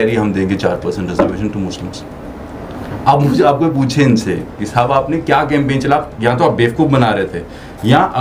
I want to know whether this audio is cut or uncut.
uncut